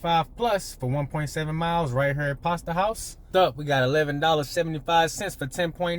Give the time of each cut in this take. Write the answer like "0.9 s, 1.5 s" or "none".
3.1 s